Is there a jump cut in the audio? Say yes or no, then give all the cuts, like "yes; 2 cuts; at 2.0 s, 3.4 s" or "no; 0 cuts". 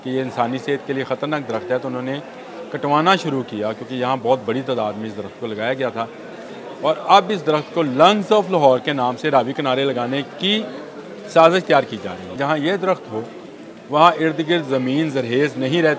yes; 1 cut; at 12.4 s